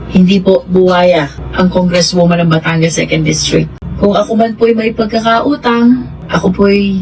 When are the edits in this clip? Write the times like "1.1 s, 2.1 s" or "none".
3.8 s